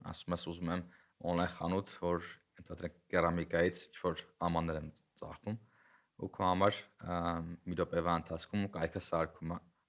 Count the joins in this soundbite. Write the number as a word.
zero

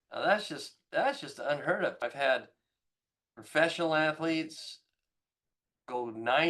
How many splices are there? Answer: one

